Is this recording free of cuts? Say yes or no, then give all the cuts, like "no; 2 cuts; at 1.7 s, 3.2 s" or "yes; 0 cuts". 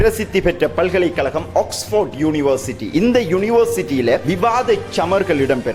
yes; 0 cuts